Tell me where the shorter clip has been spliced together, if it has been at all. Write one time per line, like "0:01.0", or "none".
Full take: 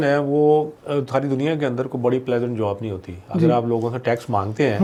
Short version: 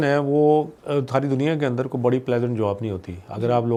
none